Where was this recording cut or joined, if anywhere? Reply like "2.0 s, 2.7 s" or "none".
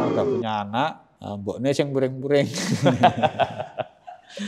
none